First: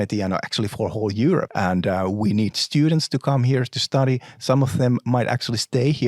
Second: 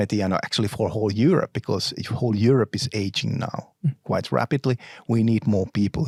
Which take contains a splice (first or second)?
first